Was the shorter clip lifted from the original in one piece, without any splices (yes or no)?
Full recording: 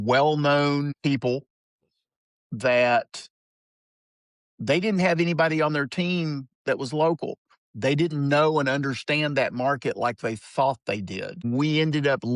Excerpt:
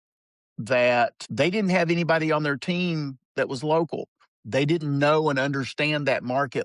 no